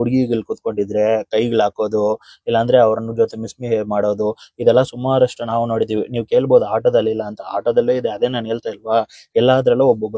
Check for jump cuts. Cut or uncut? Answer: uncut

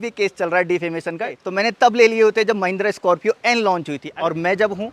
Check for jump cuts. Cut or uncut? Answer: cut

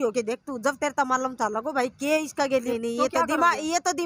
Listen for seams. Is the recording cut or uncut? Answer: cut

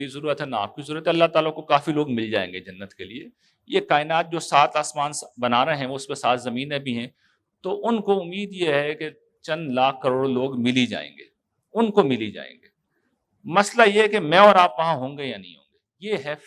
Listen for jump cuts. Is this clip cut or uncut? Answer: uncut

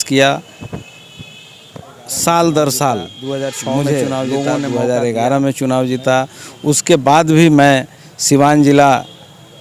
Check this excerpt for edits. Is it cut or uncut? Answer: cut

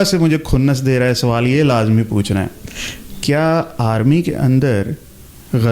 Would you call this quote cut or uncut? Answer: uncut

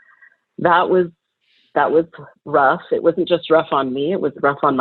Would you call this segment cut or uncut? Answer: uncut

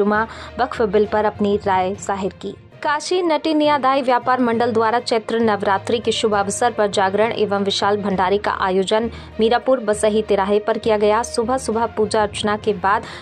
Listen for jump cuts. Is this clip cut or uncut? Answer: cut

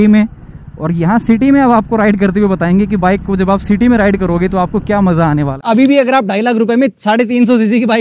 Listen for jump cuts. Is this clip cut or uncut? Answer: cut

